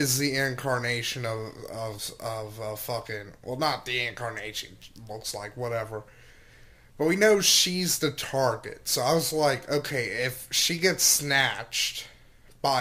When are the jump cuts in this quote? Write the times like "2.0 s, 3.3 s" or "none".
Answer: 2.0 s